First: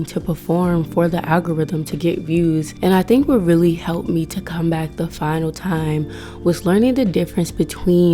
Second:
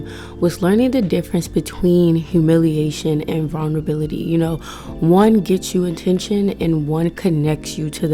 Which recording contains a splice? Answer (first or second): first